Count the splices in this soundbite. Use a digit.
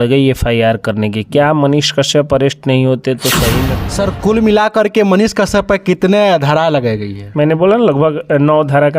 1